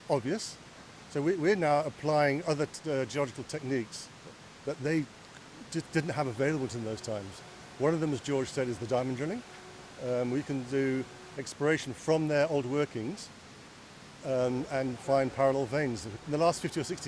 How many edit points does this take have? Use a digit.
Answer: 1